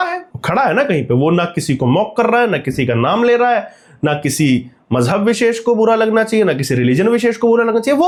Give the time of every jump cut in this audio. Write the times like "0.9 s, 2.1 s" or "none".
none